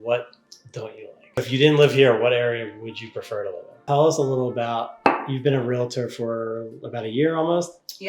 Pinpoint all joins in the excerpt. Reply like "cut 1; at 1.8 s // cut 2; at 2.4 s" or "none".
cut 1; at 1.4 s // cut 2; at 3.8 s